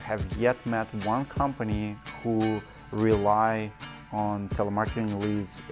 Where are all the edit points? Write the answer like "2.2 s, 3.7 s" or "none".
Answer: none